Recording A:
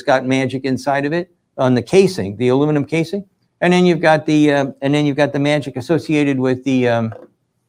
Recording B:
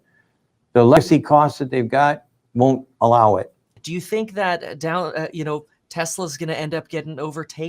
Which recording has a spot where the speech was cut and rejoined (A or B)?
B